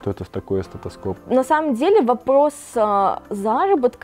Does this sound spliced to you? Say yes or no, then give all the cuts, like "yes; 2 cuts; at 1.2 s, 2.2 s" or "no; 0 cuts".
yes; 1 cut; at 1.1 s